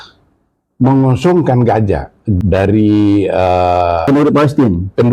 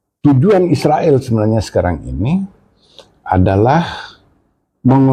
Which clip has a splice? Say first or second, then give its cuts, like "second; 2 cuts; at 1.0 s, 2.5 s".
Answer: first; 2 cuts; at 2.3 s, 4.1 s